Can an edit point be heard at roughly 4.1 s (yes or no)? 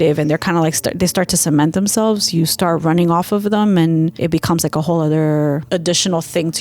yes